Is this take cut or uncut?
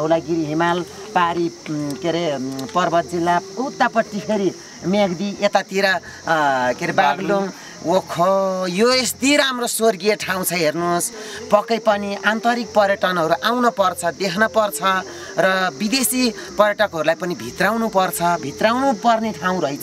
uncut